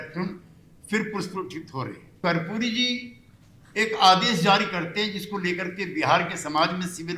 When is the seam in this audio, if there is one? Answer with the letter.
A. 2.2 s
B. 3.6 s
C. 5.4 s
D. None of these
A